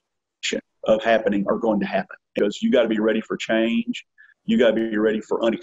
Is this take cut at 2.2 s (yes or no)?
yes